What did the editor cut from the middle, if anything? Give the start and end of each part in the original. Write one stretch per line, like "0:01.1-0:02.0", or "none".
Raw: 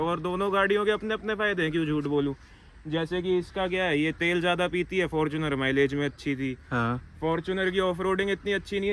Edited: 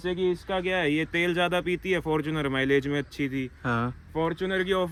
none